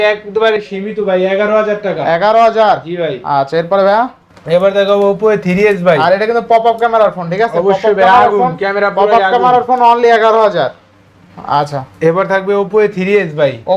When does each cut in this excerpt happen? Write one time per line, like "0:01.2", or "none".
none